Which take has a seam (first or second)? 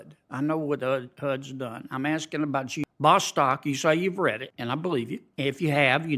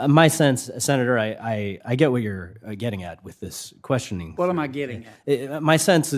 first